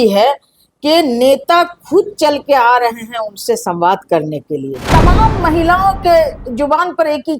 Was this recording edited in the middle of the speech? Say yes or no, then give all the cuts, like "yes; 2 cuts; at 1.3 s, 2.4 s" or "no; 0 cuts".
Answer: yes; 1 cut; at 4.9 s